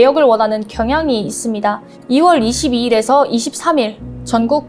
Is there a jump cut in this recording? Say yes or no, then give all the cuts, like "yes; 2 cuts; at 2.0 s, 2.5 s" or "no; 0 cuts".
yes; 1 cut; at 1.9 s